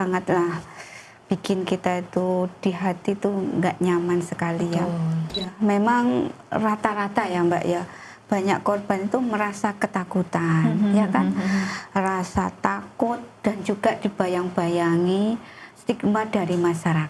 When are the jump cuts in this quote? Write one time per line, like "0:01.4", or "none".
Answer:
0:05.5